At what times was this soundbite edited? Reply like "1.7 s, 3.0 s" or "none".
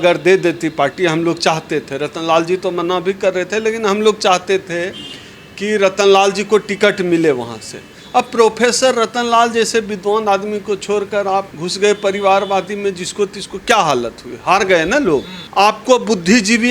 15.4 s

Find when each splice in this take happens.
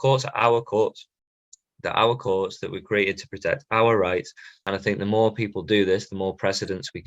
4.7 s

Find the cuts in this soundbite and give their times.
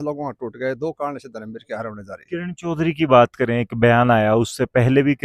none

